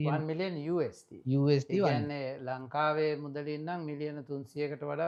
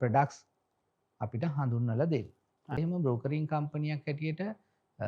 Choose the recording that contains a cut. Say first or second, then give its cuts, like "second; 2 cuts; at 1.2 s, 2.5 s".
second; 1 cut; at 2.8 s